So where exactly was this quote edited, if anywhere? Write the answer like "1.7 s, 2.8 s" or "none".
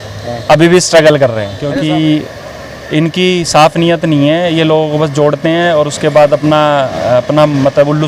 1.7 s